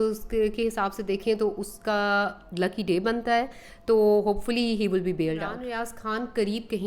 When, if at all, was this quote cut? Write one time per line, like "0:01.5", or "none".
0:05.6